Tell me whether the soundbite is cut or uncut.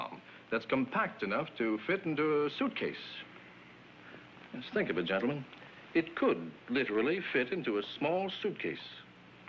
cut